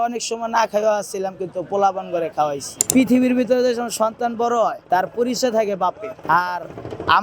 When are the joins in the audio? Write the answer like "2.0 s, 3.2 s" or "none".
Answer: 2.7 s, 4.8 s, 6.1 s